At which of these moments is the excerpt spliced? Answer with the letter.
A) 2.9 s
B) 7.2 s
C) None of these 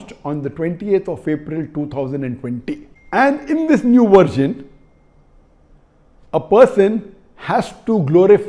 A